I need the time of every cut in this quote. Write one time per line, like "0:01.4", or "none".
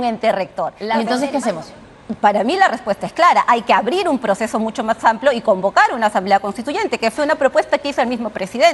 0:00.9